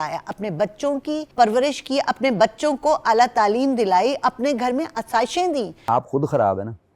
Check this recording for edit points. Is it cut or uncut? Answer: cut